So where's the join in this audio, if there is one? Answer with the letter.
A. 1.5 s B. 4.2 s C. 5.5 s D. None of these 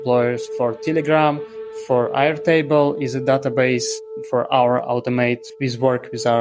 C